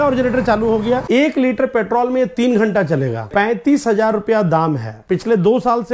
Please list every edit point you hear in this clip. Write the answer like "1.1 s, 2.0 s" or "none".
1.0 s, 3.2 s, 5.0 s